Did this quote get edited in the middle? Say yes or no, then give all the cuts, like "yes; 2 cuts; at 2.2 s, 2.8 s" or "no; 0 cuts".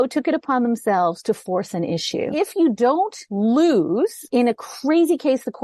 yes; 3 cuts; at 2.3 s, 3.2 s, 4.2 s